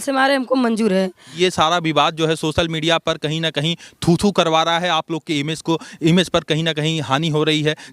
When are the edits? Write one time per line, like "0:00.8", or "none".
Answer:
0:01.3

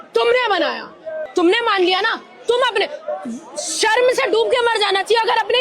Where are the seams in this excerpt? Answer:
0:01.1

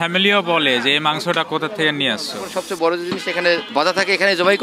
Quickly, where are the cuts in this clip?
0:02.5
0:03.7

